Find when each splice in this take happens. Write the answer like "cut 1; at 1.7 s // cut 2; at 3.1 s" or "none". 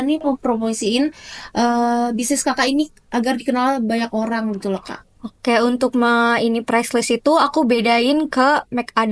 none